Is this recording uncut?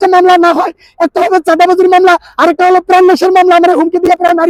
yes; 0 cuts

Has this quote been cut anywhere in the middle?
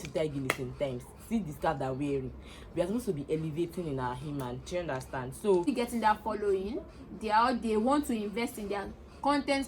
yes; 1 cut; at 5.6 s

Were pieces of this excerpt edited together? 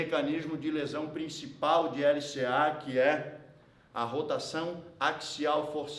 no; 0 cuts

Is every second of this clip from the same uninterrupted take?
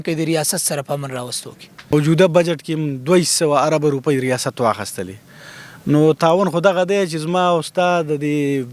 no; 1 cut; at 1.9 s

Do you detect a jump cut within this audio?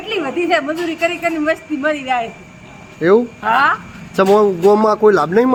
no; 0 cuts

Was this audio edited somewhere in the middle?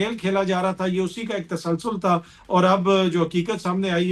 no; 0 cuts

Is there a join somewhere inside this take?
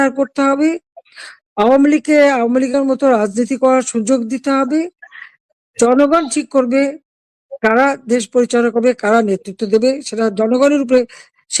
no; 0 cuts

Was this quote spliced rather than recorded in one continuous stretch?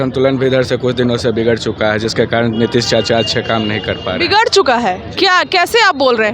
no; 0 cuts

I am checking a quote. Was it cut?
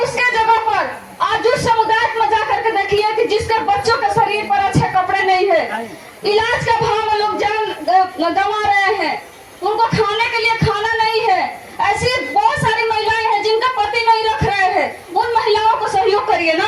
no; 0 cuts

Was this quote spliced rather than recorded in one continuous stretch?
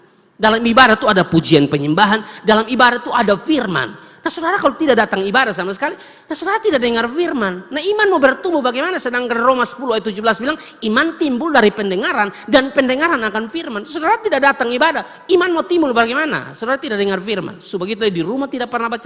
no; 0 cuts

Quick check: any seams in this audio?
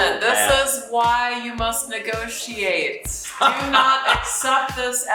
no; 0 cuts

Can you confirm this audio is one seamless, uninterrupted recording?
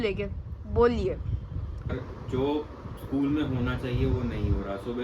no; 1 cut; at 1.9 s

